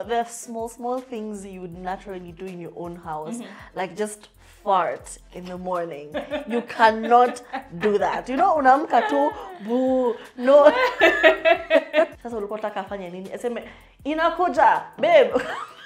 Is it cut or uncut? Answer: cut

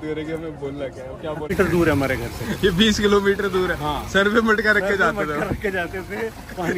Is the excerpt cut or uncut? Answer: cut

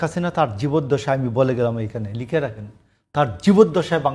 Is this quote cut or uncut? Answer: uncut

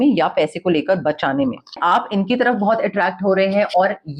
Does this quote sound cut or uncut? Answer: cut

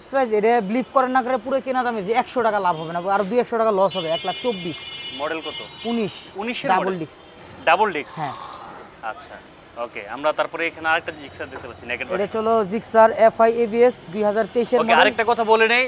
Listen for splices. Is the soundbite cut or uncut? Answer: uncut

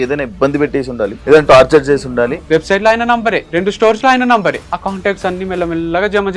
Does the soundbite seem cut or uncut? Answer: cut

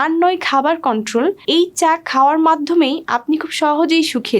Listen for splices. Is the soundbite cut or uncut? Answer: cut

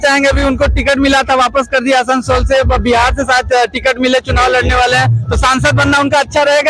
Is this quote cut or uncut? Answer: uncut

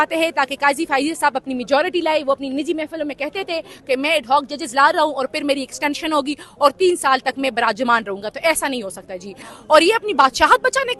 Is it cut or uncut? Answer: cut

